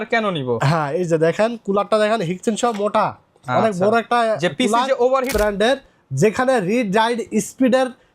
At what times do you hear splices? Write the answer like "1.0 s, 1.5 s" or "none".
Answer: 5.3 s